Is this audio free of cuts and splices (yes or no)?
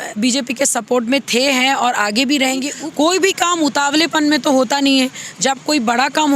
no